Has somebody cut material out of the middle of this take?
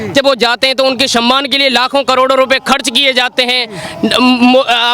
no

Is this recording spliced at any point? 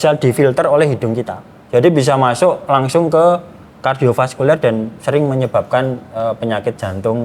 no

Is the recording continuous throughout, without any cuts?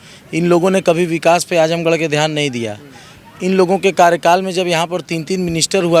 yes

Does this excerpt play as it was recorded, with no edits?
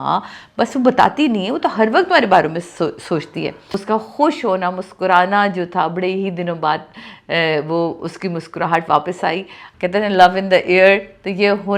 no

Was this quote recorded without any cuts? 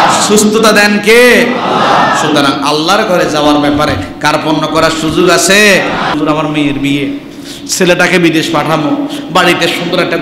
no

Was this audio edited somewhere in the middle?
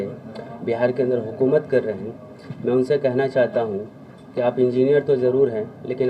no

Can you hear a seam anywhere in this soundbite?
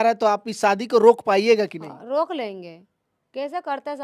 no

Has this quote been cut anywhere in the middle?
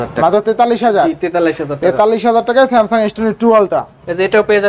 no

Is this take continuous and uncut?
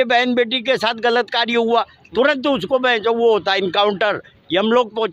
yes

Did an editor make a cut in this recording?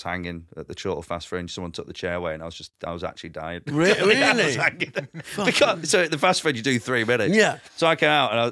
no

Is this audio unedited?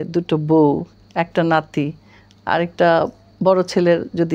yes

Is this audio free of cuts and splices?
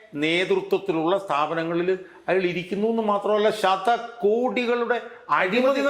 yes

